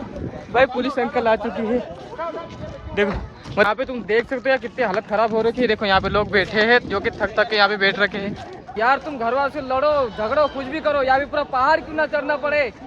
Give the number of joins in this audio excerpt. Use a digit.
2